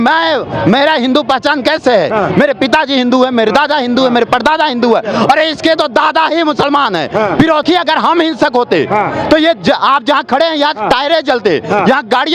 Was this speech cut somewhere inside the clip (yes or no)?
yes